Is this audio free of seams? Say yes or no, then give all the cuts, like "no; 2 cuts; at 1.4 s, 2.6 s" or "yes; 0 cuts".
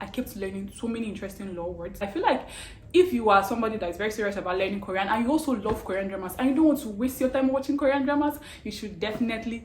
no; 1 cut; at 2.0 s